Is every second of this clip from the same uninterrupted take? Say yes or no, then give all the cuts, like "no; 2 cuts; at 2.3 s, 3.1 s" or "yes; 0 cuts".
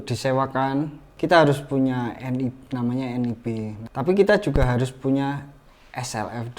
no; 2 cuts; at 1.0 s, 3.8 s